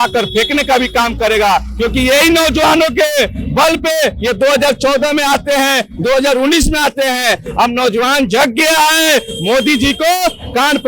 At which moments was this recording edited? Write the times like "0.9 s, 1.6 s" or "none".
none